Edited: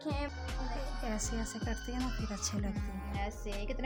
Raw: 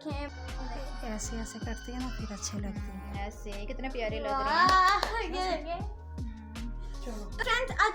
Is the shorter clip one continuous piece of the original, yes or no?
yes